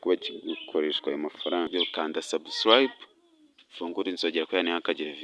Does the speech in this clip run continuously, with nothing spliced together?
no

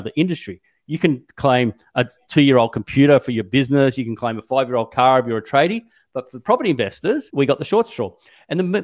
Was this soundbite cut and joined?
yes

